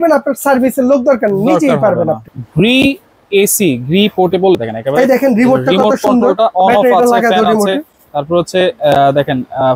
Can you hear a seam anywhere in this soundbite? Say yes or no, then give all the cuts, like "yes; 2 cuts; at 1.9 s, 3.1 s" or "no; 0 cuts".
yes; 2 cuts; at 2.3 s, 4.6 s